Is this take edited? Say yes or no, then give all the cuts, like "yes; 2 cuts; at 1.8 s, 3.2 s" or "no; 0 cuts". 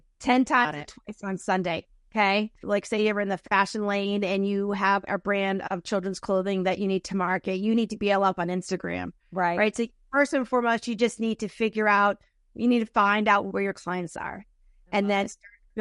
yes; 1 cut; at 2.6 s